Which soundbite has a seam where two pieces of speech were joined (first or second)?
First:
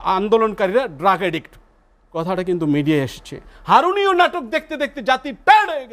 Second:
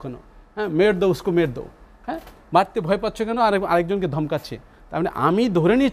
first